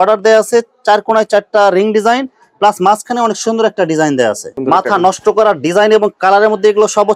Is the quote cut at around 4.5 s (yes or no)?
yes